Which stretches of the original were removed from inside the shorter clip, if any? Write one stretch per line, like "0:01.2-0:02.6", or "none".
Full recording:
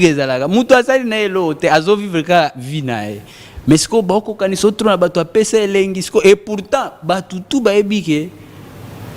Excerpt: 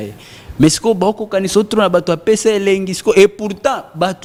none